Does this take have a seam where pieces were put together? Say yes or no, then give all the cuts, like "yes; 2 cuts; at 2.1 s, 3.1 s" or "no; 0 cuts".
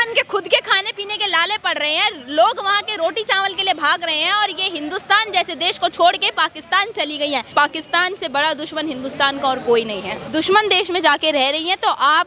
yes; 2 cuts; at 7.5 s, 10.1 s